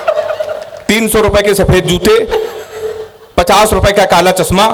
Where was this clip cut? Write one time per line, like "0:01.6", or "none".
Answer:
none

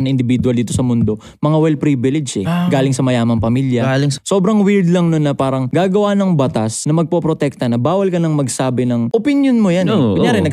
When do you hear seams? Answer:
0:04.1
0:05.6
0:06.8
0:09.1

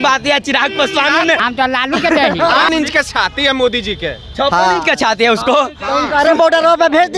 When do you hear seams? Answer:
0:01.4
0:02.7

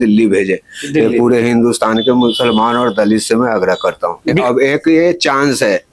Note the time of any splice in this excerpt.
0:04.4

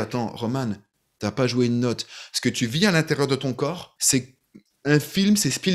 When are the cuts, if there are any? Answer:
0:03.9

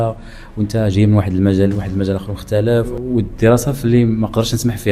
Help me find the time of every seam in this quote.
0:02.9

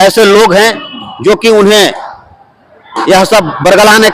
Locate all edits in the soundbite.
none

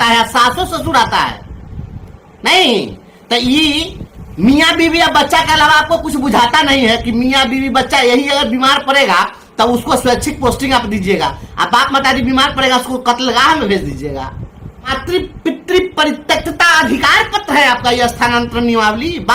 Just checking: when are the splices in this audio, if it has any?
0:15.0

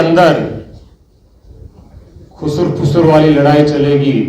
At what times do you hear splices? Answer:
none

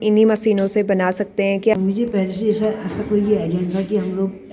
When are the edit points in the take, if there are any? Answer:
0:01.7

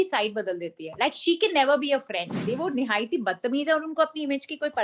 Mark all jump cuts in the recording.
0:02.4

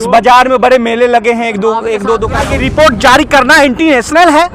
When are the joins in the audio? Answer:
0:02.5

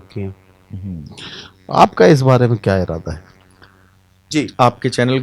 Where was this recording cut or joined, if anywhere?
0:04.2

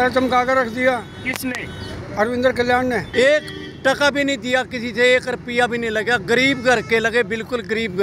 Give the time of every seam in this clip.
0:03.1

